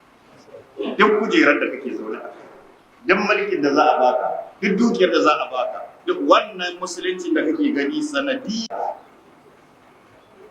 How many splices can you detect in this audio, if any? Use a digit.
1